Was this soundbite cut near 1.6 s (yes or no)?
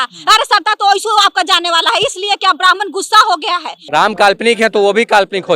no